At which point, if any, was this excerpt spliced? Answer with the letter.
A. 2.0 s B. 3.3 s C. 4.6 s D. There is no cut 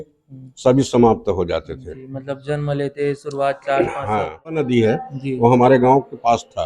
C